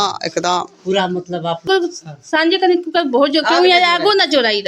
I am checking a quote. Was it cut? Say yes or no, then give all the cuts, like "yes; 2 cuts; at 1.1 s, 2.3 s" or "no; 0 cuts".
yes; 1 cut; at 1.7 s